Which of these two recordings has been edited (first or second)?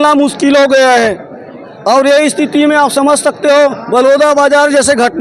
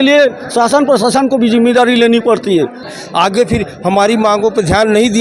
second